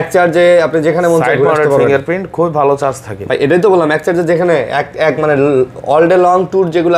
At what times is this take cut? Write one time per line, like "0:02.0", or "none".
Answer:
none